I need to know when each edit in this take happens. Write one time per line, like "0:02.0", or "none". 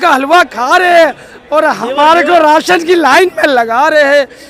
none